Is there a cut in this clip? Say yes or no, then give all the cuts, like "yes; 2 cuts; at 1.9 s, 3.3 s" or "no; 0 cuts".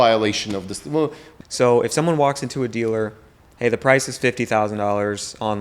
yes; 1 cut; at 1.2 s